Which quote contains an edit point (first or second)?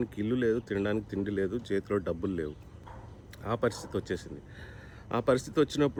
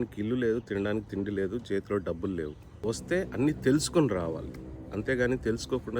second